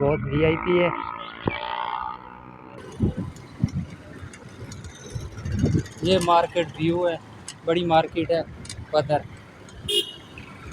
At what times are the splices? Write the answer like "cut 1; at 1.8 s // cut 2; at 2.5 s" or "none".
cut 1; at 2.8 s